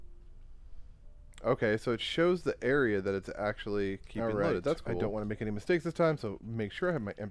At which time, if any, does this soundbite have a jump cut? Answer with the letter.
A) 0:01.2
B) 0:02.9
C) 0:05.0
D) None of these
C